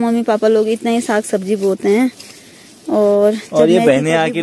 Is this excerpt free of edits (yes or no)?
yes